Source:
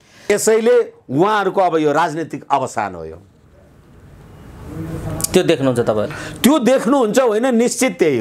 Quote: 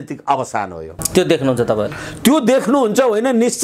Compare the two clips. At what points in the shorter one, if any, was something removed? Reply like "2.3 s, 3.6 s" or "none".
0.9 s